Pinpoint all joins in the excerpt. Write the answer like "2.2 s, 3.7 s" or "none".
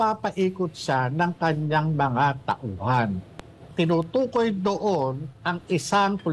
3.7 s

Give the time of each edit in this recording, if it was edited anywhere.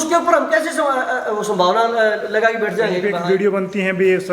3.1 s

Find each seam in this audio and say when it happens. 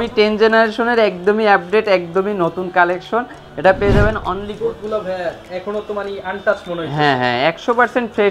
4.5 s

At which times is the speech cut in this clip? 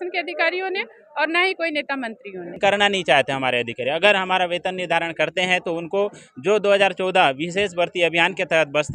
2.5 s

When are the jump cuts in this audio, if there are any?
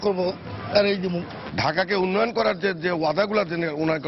1.3 s

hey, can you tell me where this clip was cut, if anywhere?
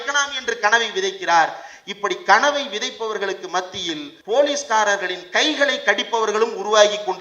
4.1 s

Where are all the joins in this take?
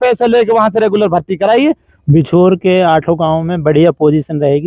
1.9 s

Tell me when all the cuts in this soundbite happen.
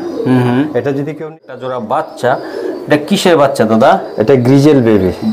1.1 s

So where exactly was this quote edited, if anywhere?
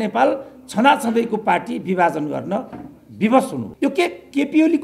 3.7 s

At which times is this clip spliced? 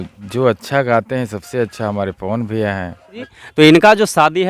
3.2 s

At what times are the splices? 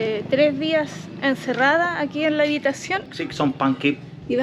3.1 s

